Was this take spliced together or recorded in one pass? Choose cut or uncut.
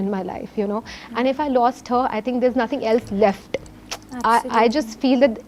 uncut